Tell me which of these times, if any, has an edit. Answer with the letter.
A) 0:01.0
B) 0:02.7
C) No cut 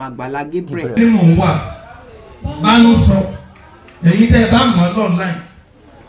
A